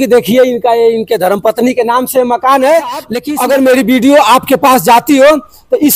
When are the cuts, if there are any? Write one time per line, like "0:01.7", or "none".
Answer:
0:03.2